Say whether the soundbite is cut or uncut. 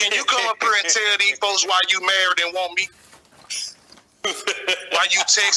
uncut